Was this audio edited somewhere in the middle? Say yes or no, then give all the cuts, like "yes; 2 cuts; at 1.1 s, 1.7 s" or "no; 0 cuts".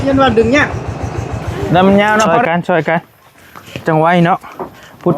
yes; 1 cut; at 2.3 s